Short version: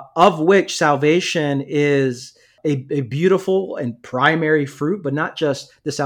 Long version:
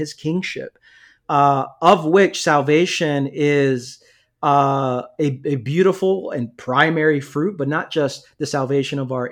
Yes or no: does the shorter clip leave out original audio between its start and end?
yes